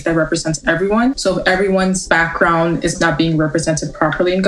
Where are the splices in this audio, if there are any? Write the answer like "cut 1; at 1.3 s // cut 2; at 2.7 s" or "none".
cut 1; at 1.2 s // cut 2; at 2.0 s // cut 3; at 3.0 s